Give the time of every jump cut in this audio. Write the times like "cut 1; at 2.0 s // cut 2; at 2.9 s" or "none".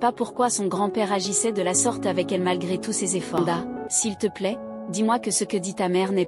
cut 1; at 3.4 s